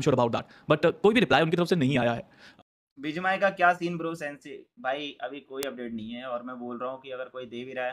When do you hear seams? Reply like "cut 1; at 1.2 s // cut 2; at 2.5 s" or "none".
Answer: cut 1; at 2.5 s